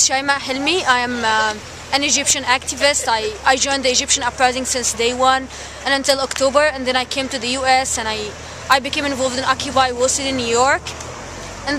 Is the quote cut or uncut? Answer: cut